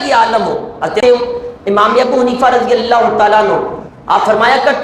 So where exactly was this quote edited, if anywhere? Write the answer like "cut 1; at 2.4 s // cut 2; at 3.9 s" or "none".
cut 1; at 1.0 s